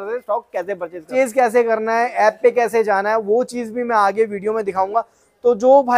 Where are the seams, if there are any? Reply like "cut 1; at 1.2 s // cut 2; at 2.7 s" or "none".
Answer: cut 1; at 1.1 s